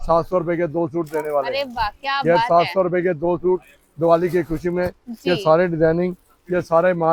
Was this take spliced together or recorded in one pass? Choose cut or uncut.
uncut